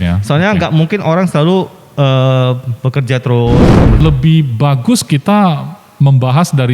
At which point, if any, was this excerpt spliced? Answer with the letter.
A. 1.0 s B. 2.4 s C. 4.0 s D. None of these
C